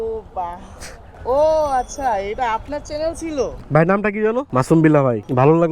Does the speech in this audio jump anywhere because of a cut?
yes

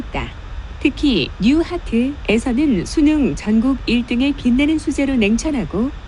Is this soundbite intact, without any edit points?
yes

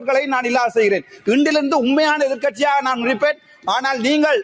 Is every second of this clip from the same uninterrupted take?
yes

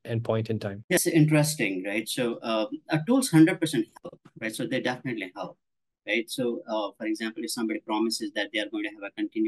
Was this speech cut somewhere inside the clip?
yes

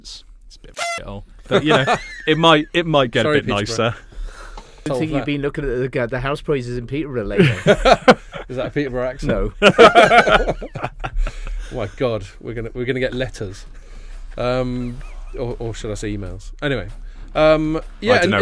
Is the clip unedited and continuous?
no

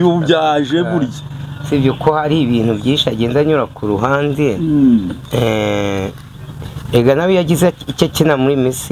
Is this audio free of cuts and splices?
yes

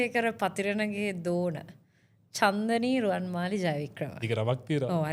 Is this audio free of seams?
yes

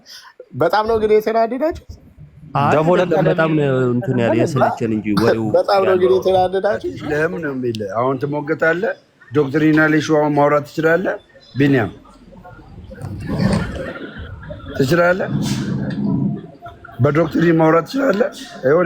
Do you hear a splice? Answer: yes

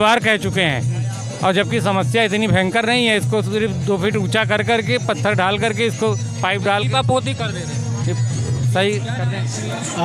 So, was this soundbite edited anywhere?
no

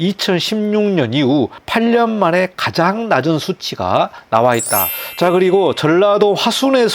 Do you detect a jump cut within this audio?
yes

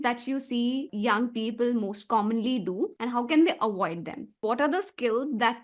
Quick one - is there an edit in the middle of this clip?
yes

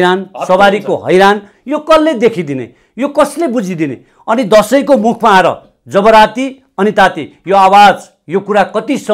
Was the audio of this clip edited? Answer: no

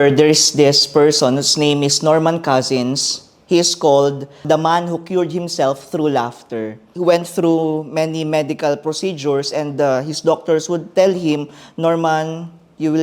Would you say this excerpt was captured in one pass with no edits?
no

